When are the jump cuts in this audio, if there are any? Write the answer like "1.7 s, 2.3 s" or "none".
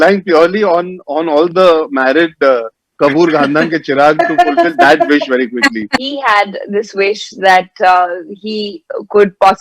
6.0 s

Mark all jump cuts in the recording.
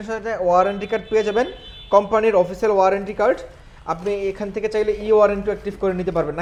none

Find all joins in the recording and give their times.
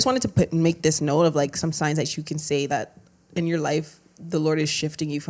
none

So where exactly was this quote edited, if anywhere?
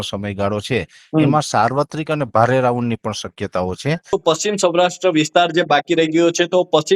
4.1 s

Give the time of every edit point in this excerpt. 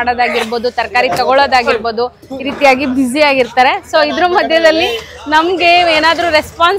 none

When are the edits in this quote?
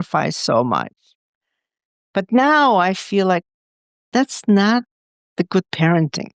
none

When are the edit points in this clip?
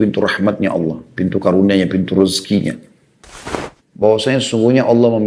3.6 s

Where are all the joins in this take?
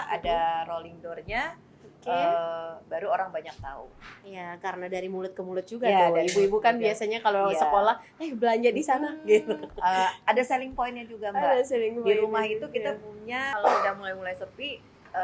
13.6 s

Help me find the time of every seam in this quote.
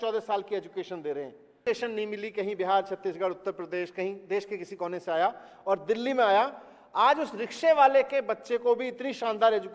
1.6 s

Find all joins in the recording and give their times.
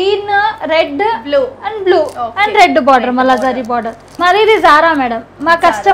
4.0 s

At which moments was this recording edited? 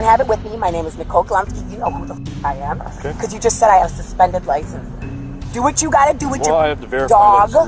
none

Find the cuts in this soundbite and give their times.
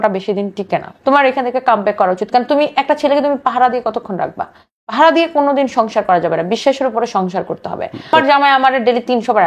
0.9 s, 8.1 s

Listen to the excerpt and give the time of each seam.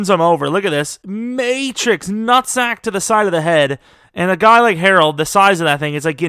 1.0 s

